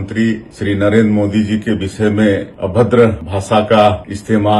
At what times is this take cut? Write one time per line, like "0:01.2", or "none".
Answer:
none